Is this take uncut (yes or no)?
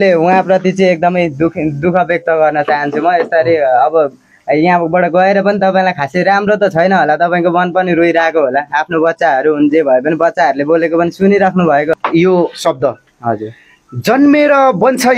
no